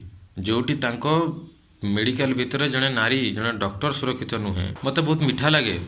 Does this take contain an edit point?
yes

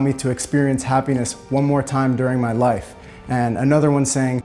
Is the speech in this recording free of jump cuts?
yes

